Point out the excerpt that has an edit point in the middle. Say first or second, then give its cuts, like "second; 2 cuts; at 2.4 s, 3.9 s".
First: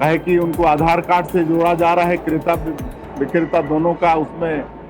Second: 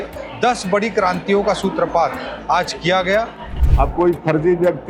second; 1 cut; at 3.5 s